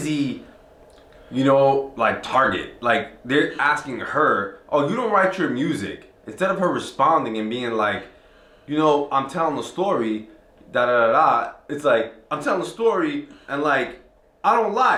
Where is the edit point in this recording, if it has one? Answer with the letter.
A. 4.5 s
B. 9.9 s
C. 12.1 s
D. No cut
D